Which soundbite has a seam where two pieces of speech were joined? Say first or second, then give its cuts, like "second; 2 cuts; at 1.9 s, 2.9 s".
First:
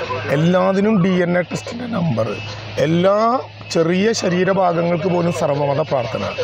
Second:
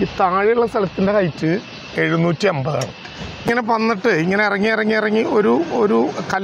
second; 1 cut; at 3.5 s